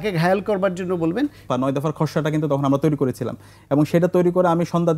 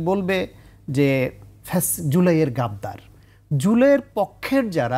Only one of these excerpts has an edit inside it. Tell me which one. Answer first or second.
first